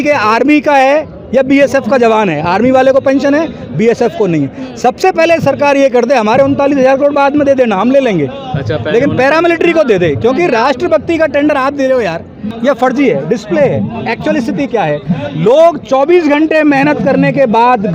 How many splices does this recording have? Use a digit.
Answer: 1